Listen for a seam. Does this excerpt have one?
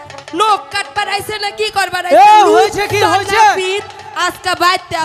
no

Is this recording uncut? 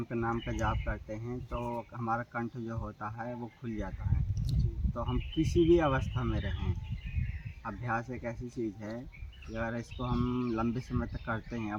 yes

